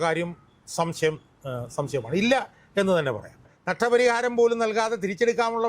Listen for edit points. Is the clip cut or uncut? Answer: cut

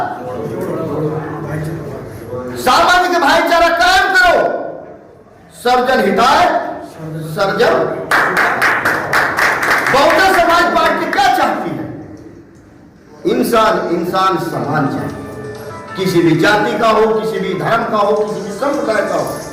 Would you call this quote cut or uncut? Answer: uncut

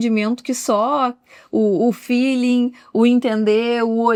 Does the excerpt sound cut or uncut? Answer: uncut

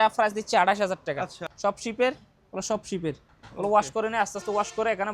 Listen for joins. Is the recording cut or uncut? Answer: cut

